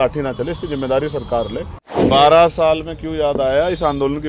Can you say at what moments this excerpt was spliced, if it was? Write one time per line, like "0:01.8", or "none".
0:02.0